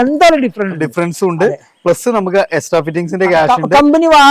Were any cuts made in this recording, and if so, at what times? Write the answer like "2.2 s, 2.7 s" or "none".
none